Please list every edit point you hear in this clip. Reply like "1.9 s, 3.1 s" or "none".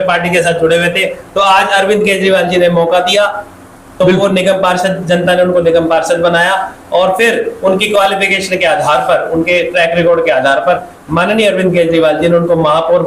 none